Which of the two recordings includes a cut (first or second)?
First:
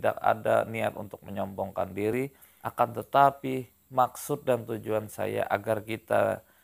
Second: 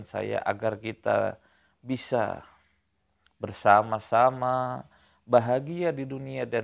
first